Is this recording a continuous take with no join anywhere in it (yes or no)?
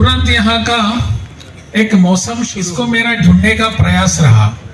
no